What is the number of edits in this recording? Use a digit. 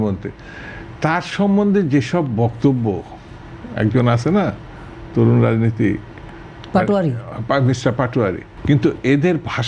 1